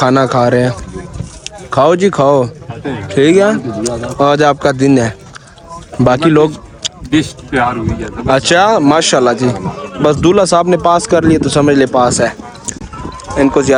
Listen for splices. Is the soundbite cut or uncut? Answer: uncut